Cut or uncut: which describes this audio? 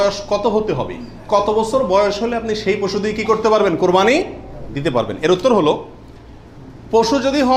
uncut